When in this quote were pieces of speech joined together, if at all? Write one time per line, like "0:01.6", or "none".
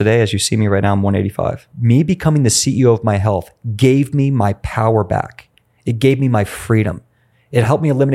0:01.7